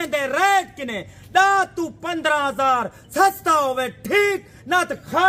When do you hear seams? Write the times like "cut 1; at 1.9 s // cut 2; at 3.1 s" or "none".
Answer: none